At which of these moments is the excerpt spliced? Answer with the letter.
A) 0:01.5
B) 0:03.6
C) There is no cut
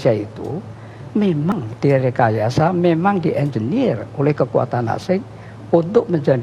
A